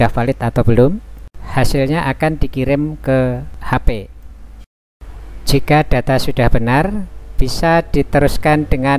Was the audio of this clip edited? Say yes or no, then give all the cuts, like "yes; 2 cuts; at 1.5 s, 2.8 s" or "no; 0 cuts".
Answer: yes; 1 cut; at 3.5 s